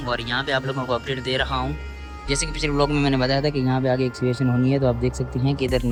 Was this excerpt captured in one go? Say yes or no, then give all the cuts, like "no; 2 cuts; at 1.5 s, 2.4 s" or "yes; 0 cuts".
yes; 0 cuts